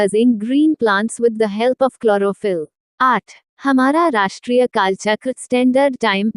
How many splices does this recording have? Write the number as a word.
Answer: one